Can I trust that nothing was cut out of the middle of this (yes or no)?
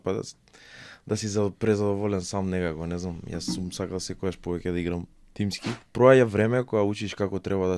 no